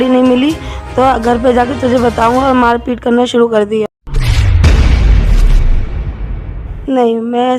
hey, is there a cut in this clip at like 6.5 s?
yes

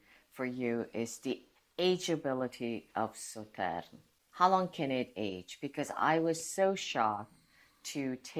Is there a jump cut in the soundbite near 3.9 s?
no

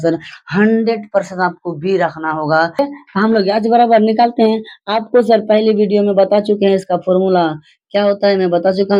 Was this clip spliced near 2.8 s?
yes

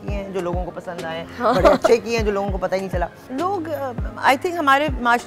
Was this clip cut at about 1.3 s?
no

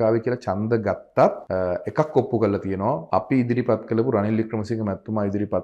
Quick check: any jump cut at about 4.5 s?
no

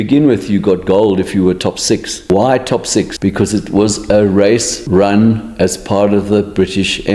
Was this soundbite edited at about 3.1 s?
yes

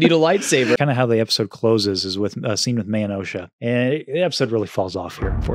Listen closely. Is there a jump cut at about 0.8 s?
yes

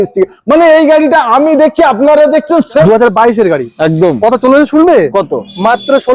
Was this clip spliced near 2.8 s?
yes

